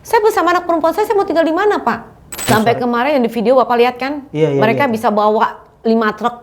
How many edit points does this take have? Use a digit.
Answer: 1